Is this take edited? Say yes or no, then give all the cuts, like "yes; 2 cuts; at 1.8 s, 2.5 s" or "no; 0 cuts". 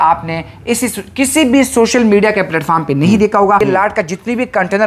yes; 1 cut; at 3.6 s